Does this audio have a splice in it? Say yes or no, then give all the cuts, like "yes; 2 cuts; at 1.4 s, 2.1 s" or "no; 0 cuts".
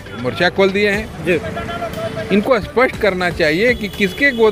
no; 0 cuts